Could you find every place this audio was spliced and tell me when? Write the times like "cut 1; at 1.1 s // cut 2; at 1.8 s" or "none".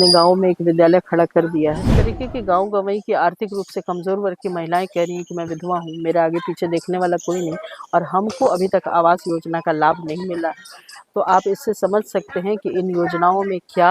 cut 1; at 1.9 s